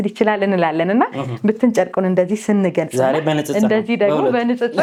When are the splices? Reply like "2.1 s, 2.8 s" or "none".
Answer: none